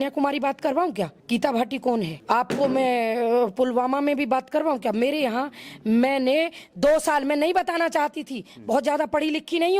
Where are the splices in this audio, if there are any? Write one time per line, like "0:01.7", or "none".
0:01.2
0:02.2